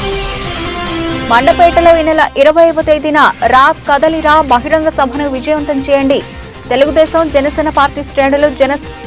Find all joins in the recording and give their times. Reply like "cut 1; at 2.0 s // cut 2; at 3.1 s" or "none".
cut 1; at 1.0 s